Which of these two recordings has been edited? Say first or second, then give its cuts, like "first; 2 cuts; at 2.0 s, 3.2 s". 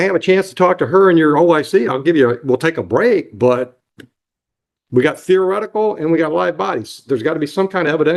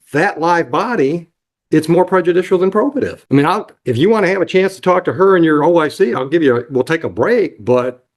second; 1 cut; at 3.2 s